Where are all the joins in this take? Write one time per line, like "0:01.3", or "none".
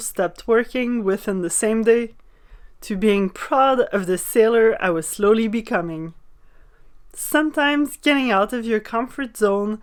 none